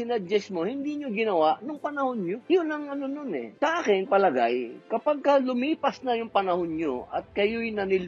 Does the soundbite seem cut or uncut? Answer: cut